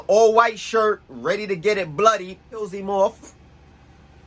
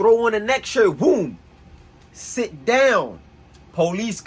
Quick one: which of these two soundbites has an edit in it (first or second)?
first